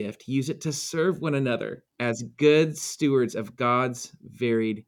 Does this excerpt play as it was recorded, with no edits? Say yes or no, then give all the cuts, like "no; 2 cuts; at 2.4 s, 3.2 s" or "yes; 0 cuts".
no; 1 cut; at 1.8 s